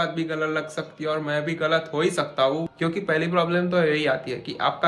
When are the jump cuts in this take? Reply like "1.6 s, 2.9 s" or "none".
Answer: 2.7 s